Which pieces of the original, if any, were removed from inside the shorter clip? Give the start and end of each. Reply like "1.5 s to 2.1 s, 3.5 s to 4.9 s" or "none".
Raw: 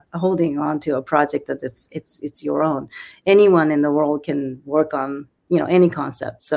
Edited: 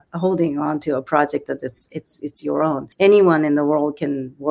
2.9 s to 3.1 s